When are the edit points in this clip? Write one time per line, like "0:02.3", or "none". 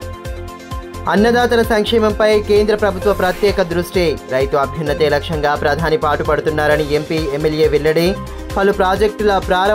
0:00.9